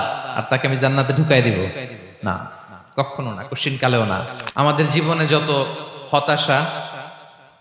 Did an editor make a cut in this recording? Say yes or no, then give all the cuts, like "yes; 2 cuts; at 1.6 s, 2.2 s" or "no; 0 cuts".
yes; 1 cut; at 4.4 s